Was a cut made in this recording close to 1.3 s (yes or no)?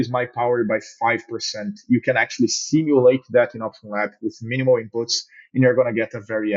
no